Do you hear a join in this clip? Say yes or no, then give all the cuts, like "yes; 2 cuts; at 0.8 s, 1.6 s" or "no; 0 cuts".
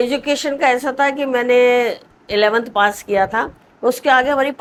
no; 0 cuts